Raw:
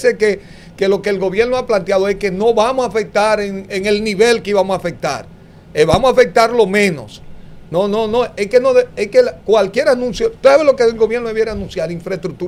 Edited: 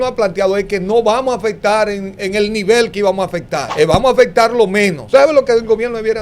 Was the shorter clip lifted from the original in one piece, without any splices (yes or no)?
no